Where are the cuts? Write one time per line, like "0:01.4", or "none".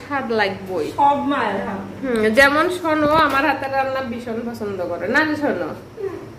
none